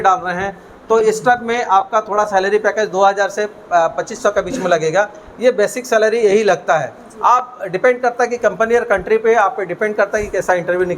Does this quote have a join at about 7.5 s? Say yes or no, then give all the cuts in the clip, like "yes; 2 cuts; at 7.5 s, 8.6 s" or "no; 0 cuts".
no; 0 cuts